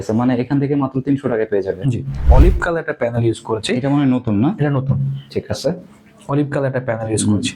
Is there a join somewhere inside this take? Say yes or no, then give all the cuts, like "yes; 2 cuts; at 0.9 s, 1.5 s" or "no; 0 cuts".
yes; 1 cut; at 2.2 s